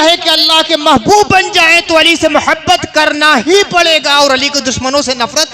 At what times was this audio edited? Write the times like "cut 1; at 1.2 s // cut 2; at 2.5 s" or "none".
none